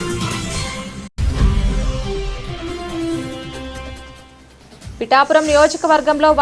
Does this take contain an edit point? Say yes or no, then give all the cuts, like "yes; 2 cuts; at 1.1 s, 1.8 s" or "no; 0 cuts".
no; 0 cuts